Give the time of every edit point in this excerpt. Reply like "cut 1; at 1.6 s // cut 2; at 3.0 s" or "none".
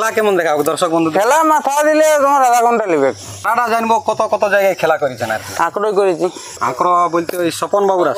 cut 1; at 3.3 s // cut 2; at 6.6 s

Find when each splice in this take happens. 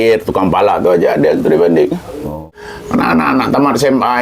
cut 1; at 2.2 s

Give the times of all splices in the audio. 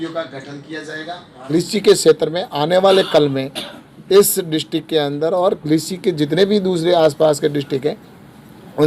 cut 1; at 1.4 s

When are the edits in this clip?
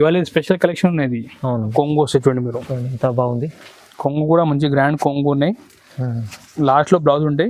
cut 1; at 1.7 s

